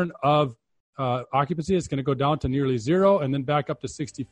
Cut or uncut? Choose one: uncut